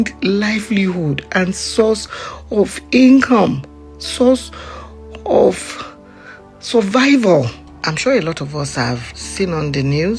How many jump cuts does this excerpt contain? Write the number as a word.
two